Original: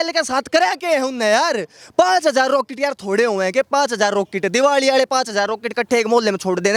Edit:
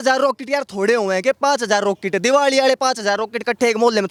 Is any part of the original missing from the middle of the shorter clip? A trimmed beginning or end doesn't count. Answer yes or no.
no